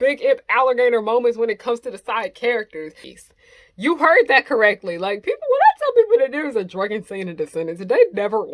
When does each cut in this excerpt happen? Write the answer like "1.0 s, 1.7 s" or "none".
3.0 s